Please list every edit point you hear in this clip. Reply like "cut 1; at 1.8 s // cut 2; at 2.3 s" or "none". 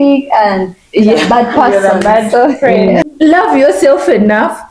cut 1; at 3.1 s

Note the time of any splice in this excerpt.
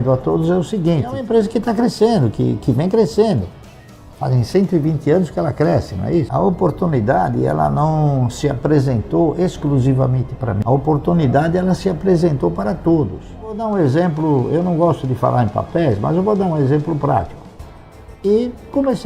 cut 1; at 1.2 s // cut 2; at 6.4 s // cut 3; at 10.6 s // cut 4; at 13.6 s // cut 5; at 17.5 s

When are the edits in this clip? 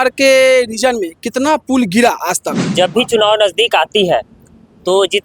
cut 1; at 2.7 s

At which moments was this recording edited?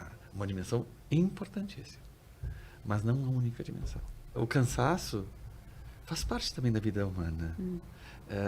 cut 1; at 4.4 s

